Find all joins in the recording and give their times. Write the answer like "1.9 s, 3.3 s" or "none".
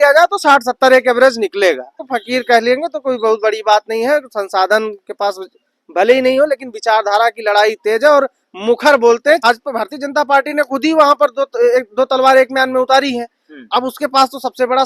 2.1 s, 9.4 s